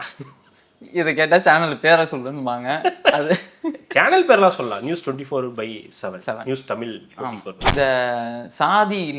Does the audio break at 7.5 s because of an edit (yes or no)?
yes